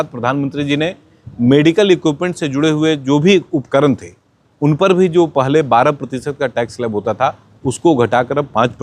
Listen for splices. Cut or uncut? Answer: uncut